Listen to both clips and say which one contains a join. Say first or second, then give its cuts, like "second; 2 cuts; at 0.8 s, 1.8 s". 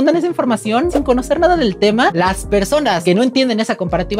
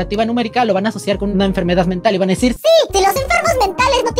first; 1 cut; at 2.1 s